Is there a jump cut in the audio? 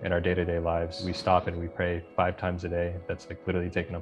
yes; 1 cut; at 1.1 s

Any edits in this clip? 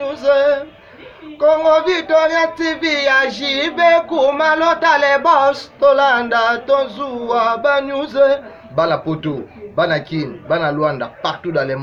no; 0 cuts

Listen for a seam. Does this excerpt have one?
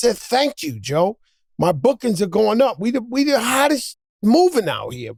no; 0 cuts

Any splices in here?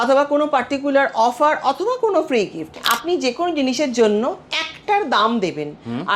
yes; 1 cut; at 2.9 s

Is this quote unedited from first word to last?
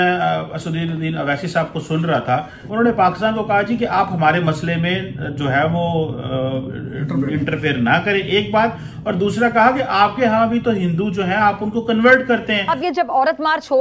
no; 2 cuts; at 2.6 s, 12.7 s

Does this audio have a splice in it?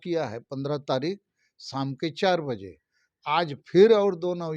no; 0 cuts

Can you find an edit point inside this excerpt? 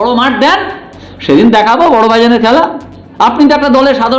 no; 0 cuts

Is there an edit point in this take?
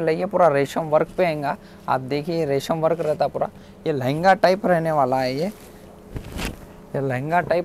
no; 0 cuts

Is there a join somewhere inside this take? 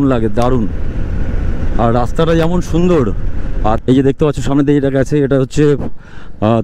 yes; 1 cut; at 3.8 s

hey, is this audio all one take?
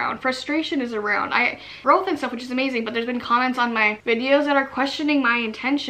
no; 1 cut; at 1.7 s

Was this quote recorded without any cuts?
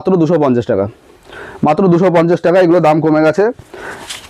yes; 0 cuts

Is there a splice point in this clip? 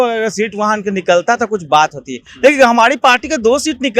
no; 0 cuts

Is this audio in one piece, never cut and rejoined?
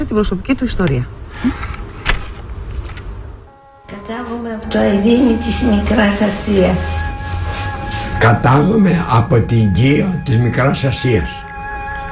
no; 1 cut; at 9.5 s

